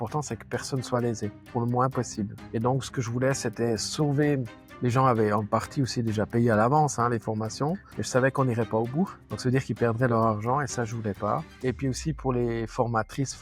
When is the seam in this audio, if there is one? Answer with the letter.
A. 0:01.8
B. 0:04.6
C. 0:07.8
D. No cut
B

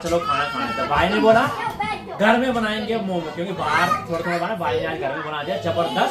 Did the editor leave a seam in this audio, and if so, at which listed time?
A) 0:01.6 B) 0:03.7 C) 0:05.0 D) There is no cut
D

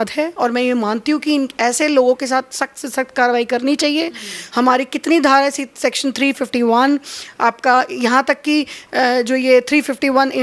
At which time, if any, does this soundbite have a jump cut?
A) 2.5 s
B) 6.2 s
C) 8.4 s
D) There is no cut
D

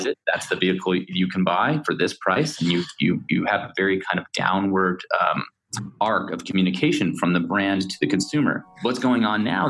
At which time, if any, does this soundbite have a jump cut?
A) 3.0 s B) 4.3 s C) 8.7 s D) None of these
C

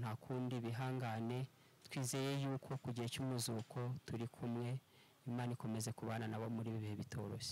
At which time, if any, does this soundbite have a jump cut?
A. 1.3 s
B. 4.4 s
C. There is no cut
C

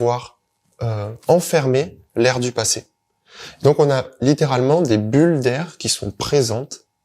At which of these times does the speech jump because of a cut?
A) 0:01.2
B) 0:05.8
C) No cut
C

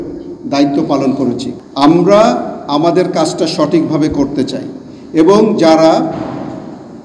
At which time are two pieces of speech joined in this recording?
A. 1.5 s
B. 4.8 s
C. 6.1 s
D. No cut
A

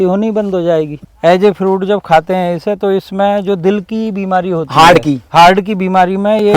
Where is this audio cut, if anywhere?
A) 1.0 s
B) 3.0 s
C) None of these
A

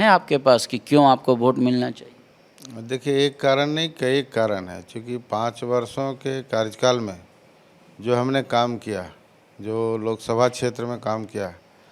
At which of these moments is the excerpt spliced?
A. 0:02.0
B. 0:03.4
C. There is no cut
C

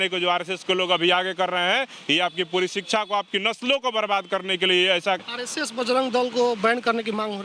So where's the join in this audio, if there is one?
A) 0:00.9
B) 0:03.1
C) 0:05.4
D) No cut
C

